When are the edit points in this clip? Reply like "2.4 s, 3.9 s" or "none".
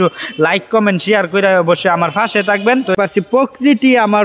2.9 s